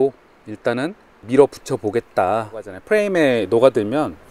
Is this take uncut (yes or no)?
no